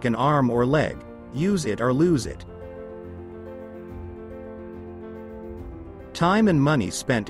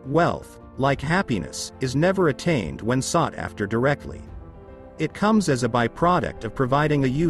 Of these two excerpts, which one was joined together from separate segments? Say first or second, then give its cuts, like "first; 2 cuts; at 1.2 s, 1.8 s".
first; 3 cuts; at 2.4 s, 4.5 s, 6.0 s